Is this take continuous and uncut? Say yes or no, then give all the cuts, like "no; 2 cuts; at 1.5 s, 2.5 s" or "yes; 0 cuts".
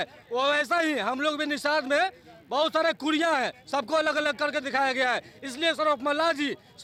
yes; 0 cuts